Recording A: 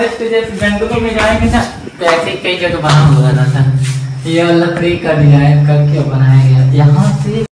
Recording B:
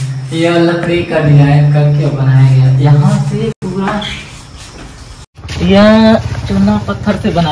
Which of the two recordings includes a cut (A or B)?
B